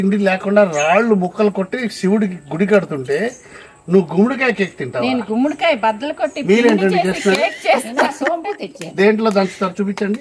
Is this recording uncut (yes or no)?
yes